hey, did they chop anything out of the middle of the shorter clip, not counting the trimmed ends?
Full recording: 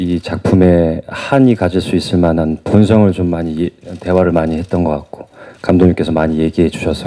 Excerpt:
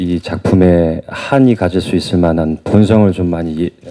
no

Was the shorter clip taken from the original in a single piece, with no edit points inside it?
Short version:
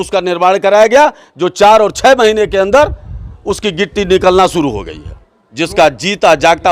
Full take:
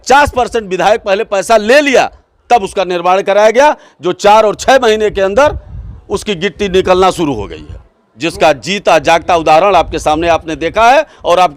yes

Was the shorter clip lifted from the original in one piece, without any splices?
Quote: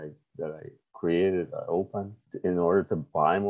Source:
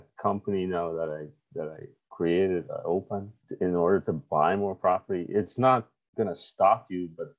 yes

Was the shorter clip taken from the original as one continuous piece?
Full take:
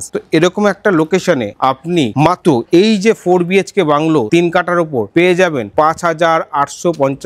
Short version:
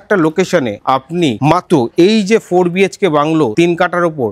yes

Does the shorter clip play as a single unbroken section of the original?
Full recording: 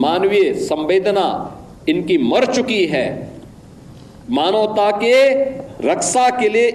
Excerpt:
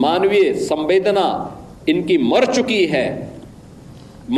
yes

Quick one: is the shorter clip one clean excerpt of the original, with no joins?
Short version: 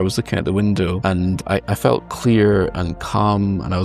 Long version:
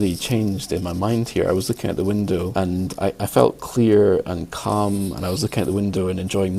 yes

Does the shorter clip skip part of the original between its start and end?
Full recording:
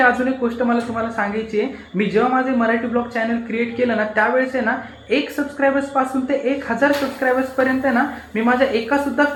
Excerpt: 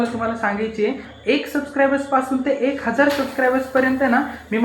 yes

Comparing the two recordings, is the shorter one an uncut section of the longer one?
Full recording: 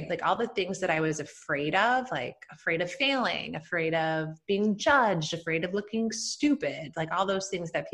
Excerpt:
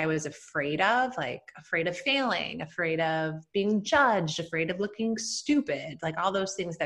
yes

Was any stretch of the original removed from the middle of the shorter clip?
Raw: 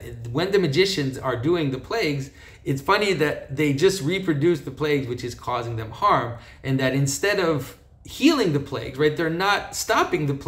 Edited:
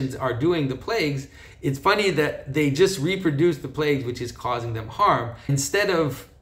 yes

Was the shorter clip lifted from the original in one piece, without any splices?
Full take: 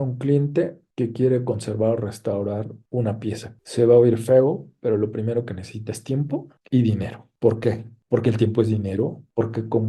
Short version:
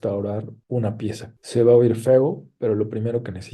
yes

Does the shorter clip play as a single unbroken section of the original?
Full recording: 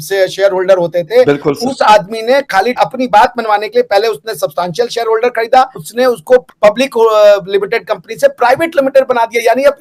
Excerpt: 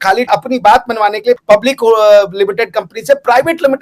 no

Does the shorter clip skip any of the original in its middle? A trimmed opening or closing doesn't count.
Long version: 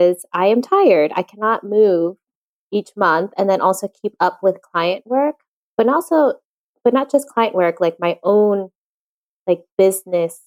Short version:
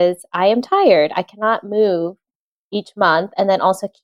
no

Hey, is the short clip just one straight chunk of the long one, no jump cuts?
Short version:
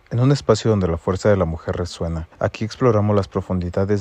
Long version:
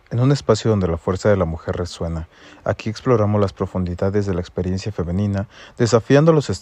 no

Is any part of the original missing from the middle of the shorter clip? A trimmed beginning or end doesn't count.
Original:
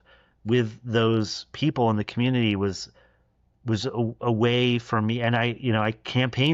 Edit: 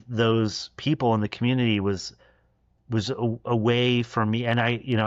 no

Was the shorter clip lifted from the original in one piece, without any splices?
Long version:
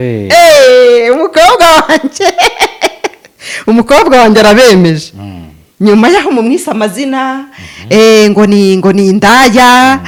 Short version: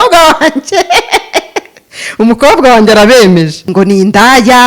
no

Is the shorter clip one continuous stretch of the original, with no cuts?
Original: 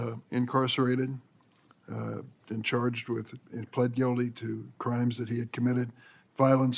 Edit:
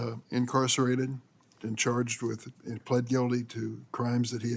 no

